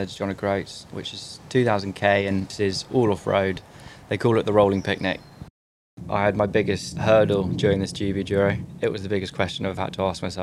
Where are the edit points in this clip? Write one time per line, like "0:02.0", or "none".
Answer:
0:00.9
0:02.5
0:05.8
0:06.9
0:08.7